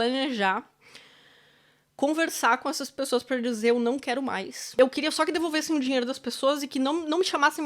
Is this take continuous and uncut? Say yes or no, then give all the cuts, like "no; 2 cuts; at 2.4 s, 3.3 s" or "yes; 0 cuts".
no; 1 cut; at 4.7 s